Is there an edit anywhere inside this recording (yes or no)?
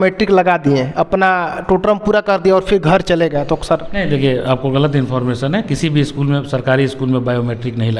no